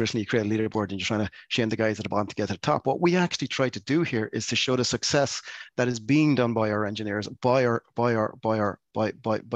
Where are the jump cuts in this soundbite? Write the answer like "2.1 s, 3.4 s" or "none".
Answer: none